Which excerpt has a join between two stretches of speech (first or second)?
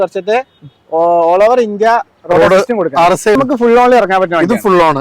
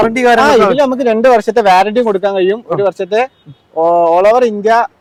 first